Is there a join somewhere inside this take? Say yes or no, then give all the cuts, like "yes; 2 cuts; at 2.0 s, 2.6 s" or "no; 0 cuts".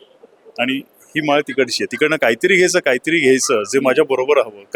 no; 0 cuts